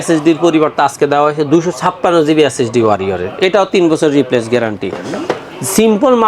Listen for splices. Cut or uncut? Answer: uncut